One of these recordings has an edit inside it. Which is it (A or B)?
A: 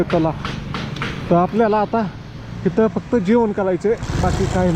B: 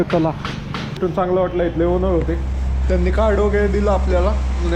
B